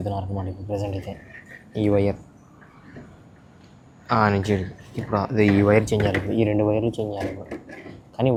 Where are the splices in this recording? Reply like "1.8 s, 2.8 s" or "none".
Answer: none